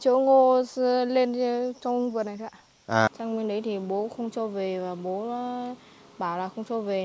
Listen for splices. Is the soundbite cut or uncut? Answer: cut